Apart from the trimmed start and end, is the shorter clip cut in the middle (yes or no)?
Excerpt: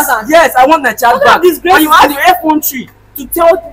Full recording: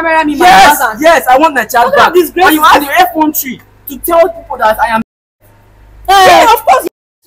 no